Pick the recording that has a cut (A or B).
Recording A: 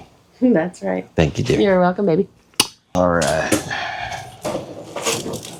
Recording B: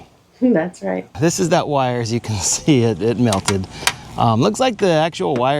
B